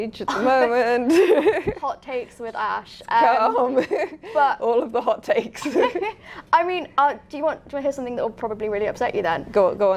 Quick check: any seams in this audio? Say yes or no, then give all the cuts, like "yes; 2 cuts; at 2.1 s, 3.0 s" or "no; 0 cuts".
no; 0 cuts